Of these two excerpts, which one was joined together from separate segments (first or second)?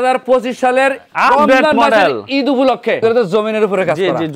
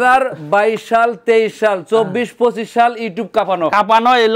first